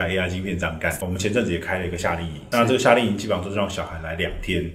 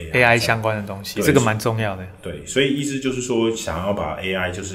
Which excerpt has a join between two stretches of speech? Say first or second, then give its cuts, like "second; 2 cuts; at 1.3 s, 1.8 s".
first; 1 cut; at 0.9 s